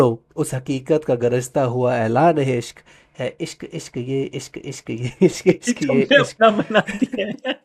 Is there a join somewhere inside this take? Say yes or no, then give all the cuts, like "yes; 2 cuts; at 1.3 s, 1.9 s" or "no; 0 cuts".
no; 0 cuts